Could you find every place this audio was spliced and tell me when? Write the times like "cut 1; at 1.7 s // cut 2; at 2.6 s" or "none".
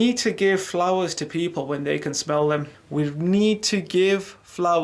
cut 1; at 2.8 s